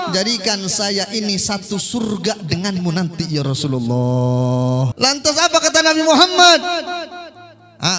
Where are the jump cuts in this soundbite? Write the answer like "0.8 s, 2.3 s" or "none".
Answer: 4.9 s